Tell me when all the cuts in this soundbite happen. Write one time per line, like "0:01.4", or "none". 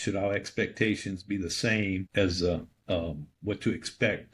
0:02.1